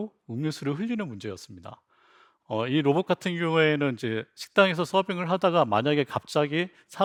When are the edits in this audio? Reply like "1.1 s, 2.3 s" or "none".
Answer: none